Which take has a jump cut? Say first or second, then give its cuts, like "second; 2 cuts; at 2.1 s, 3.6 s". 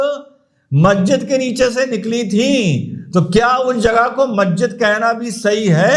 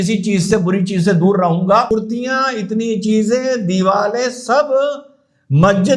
second; 1 cut; at 1.9 s